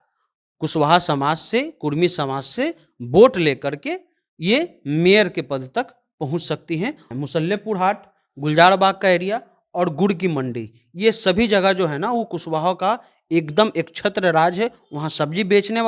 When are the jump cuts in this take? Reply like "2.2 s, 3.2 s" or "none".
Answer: 7.1 s